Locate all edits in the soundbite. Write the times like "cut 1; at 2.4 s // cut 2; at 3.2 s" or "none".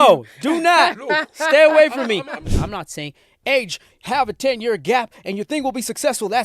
cut 1; at 2.4 s

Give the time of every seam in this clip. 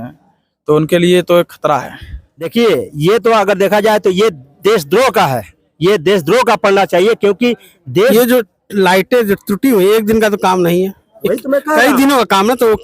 cut 1; at 2.5 s // cut 2; at 7.8 s

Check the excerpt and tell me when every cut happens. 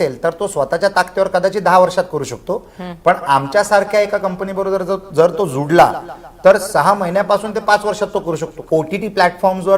cut 1; at 8.6 s

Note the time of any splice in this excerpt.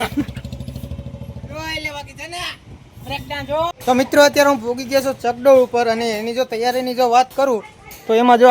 cut 1; at 3.8 s

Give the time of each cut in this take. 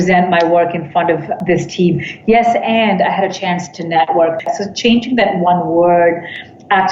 cut 1; at 1.4 s // cut 2; at 4.5 s

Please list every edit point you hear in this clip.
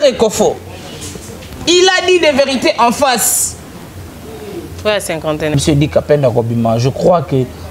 cut 1; at 5.5 s

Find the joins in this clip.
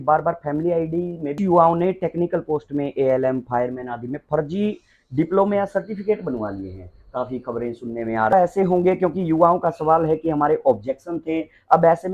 cut 1; at 1.3 s // cut 2; at 8.3 s

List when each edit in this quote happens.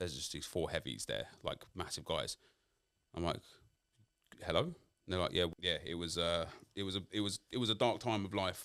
cut 1; at 5.5 s

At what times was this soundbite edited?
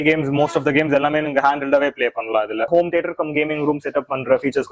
cut 1; at 2.7 s

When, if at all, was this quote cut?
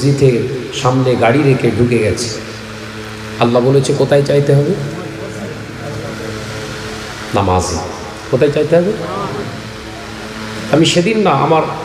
none

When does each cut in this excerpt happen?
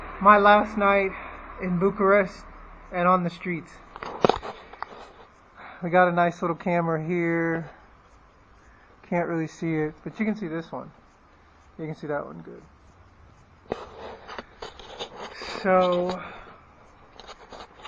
cut 1; at 8.5 s

